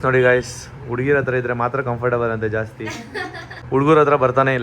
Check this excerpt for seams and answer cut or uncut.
cut